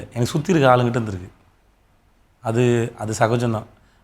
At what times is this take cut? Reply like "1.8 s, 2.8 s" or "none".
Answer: none